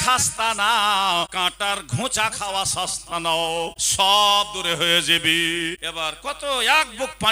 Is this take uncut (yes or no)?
no